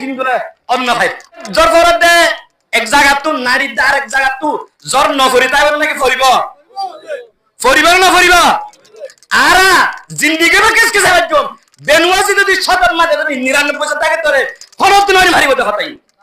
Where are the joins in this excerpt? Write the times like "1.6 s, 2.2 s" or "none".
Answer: 1.5 s